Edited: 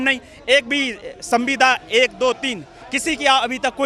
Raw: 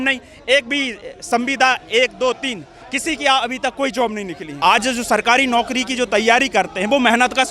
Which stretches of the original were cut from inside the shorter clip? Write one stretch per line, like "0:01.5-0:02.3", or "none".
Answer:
none